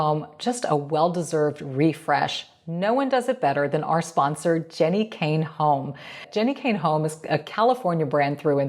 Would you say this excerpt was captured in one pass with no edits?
no; 1 cut; at 6.3 s

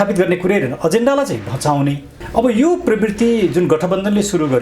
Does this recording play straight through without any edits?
no; 1 cut; at 2.1 s

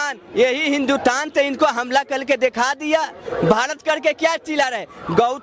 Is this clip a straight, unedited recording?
yes; 0 cuts

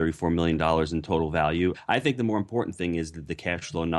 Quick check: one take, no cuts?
no; 1 cut; at 1.8 s

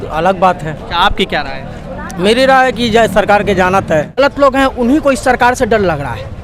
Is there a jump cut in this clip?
yes; 1 cut; at 4.2 s

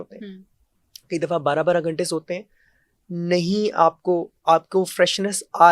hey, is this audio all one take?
yes; 0 cuts

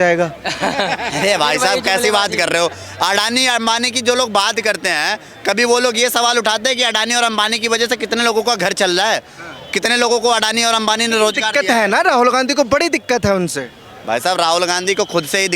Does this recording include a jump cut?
no; 0 cuts

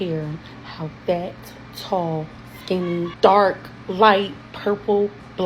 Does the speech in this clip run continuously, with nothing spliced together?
no; 1 cut; at 3.1 s

